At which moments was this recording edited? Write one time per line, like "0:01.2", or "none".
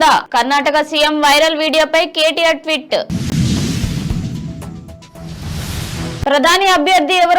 0:03.3
0:04.3
0:06.2

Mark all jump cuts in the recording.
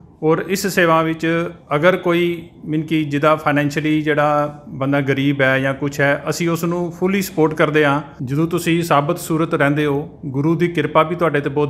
0:08.2

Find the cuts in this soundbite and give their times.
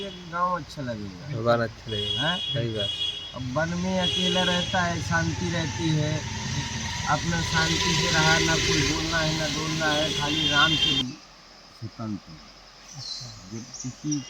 0:11.0

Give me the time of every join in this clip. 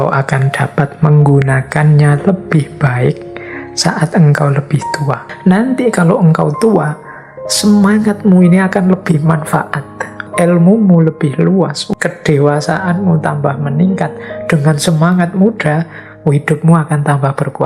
0:05.3
0:10.2
0:11.8

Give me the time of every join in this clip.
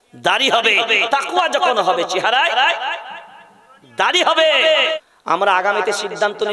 0:04.9

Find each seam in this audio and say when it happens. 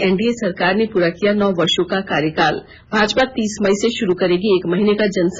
0:02.7

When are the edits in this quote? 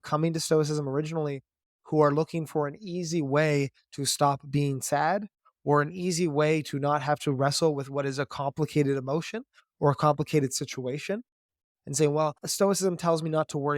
0:11.7
0:12.4

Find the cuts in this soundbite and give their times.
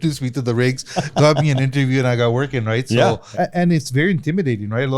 0:03.2

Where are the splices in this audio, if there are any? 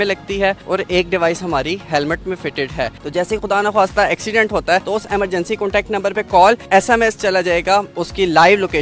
0:02.9
0:04.8
0:06.6
0:07.9

